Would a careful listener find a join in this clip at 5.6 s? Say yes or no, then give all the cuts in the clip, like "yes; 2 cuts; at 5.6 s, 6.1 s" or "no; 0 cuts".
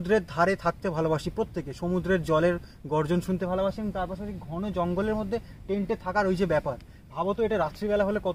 no; 0 cuts